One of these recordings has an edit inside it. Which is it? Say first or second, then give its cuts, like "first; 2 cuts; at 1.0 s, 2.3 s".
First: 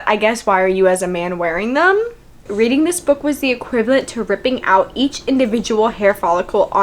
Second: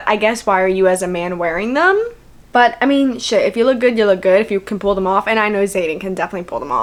first; 1 cut; at 2.4 s